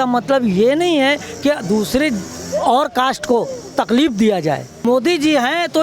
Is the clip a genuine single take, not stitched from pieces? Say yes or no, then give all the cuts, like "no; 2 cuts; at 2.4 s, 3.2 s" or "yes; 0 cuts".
no; 1 cut; at 4.8 s